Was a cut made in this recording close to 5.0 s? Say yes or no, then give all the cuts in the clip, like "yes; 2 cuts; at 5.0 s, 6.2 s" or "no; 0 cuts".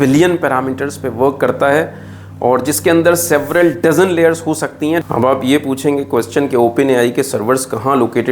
yes; 1 cut; at 5.0 s